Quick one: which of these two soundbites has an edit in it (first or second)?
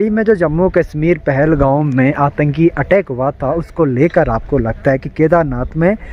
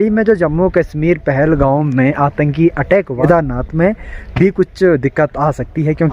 second